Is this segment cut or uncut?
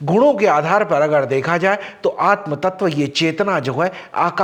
uncut